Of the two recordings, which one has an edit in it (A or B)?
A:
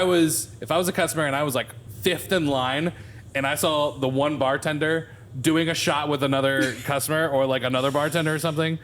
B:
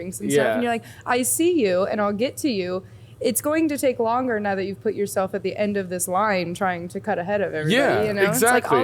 A